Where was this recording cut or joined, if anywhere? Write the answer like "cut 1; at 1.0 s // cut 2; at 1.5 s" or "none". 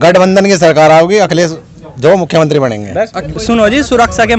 cut 1; at 3.2 s